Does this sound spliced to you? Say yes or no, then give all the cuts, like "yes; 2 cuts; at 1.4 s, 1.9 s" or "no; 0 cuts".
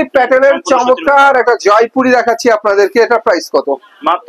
no; 0 cuts